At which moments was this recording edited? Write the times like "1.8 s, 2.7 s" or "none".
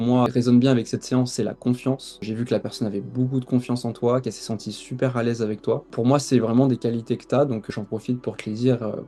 none